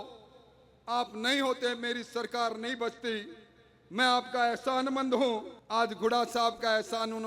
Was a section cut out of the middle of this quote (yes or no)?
yes